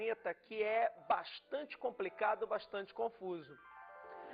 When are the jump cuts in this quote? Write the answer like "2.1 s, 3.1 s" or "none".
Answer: 1.0 s